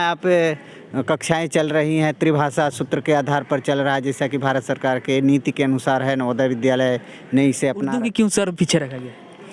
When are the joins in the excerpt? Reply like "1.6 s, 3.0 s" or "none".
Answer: 7.9 s